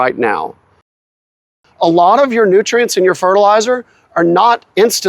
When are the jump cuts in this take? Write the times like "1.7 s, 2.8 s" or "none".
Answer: 1.1 s